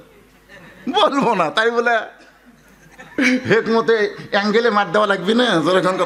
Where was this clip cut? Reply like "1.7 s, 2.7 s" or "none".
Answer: none